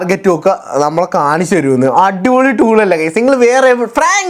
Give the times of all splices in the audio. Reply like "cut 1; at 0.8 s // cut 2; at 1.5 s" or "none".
none